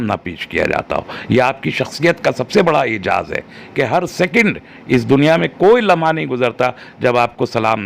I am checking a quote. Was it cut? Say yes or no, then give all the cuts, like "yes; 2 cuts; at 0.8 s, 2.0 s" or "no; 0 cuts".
no; 0 cuts